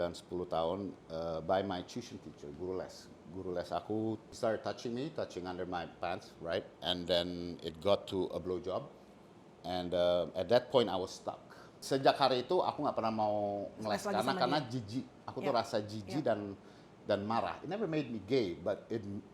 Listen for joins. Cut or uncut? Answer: cut